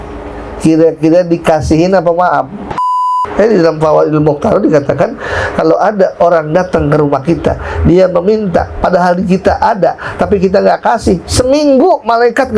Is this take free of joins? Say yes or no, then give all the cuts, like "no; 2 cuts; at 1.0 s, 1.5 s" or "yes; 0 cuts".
no; 1 cut; at 3.0 s